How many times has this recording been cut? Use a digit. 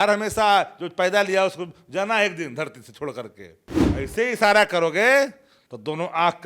1